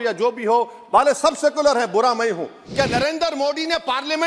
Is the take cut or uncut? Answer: cut